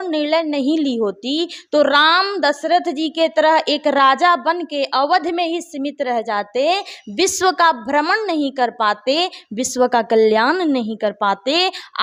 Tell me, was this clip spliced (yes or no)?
no